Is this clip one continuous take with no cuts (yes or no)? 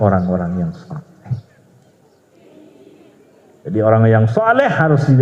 no